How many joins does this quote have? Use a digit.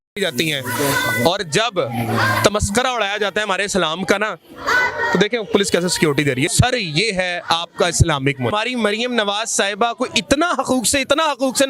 2